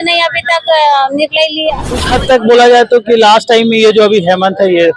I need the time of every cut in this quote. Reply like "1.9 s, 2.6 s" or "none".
2.0 s